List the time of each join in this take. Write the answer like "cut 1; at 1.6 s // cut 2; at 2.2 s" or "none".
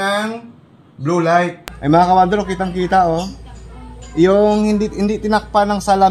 cut 1; at 1.7 s